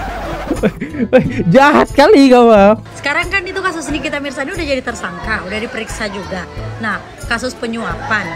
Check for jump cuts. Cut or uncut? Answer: cut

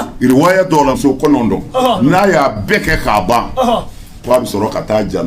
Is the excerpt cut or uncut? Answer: cut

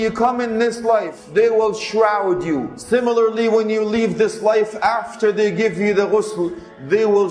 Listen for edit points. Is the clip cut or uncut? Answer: cut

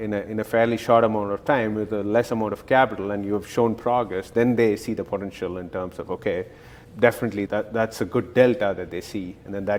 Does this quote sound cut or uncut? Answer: uncut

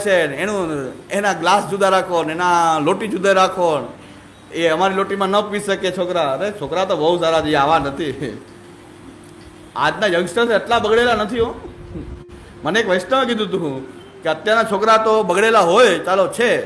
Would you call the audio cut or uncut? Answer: uncut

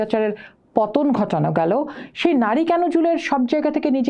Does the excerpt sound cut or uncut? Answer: uncut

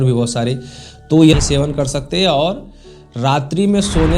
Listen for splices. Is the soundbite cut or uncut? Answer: cut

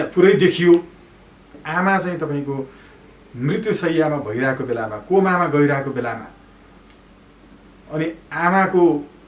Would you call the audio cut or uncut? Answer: cut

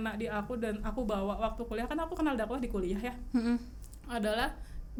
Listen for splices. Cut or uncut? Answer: uncut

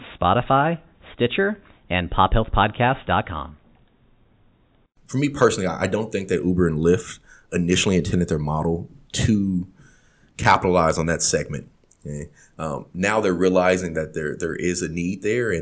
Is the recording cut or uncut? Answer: cut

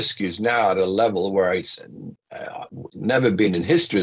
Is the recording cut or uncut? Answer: uncut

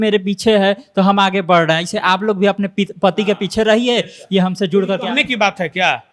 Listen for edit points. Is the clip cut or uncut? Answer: uncut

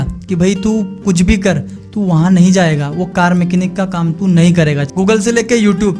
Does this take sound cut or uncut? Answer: cut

